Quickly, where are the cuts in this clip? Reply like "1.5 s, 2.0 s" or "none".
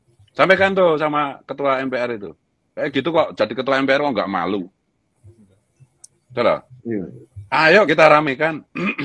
none